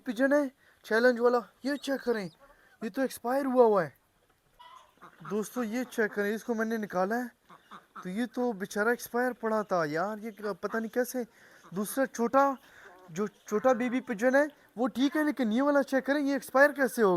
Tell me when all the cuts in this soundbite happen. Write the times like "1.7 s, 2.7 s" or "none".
none

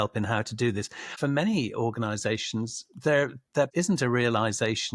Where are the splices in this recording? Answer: 1.1 s, 3.7 s

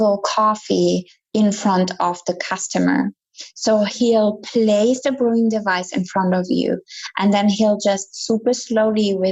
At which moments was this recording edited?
none

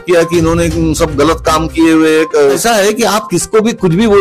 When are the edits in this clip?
2.6 s

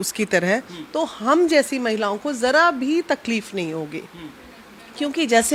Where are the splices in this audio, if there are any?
none

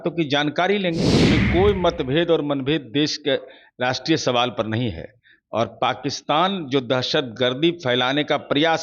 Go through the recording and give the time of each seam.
1.3 s

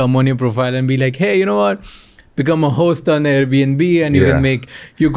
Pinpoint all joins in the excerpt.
none

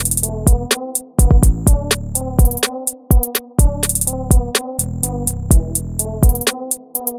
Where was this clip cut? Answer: none

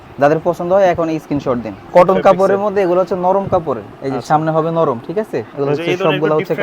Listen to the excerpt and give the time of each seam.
1.8 s, 5.5 s

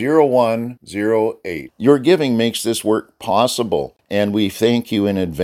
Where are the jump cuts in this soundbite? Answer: 4.0 s

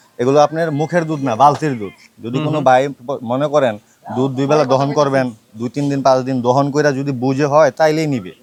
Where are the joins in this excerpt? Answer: none

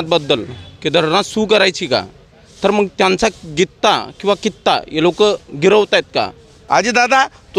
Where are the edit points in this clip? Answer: 6.5 s

